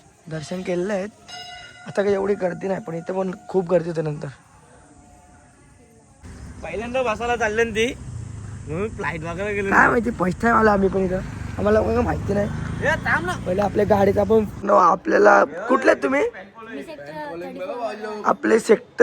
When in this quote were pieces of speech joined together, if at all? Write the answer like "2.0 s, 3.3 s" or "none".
6.2 s, 14.5 s

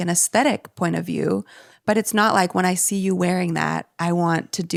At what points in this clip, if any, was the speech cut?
none

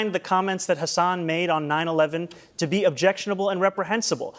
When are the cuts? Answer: none

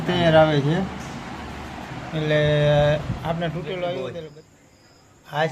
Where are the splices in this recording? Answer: 4.1 s

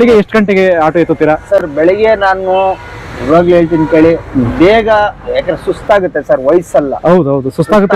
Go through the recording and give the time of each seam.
none

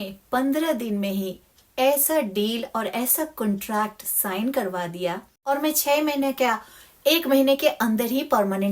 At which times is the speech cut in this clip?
5.3 s

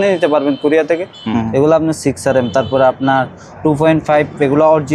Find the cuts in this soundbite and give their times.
1.2 s

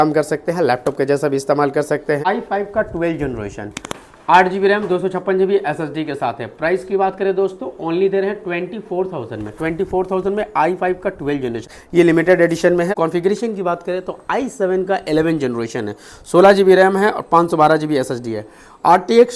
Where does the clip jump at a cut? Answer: 2.2 s, 11.7 s, 12.9 s

